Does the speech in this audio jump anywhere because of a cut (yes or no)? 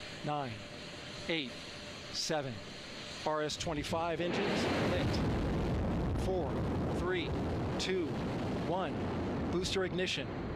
no